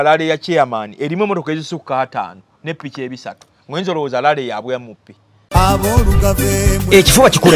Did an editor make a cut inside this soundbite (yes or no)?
yes